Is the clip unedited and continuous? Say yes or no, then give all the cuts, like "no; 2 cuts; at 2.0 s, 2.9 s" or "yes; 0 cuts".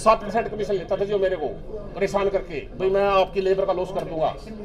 yes; 0 cuts